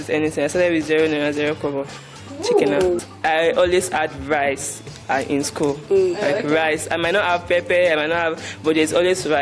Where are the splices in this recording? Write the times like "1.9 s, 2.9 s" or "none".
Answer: 3.0 s